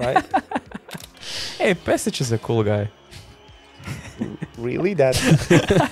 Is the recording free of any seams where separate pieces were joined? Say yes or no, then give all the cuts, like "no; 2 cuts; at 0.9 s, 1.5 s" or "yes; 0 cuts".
no; 1 cut; at 1.1 s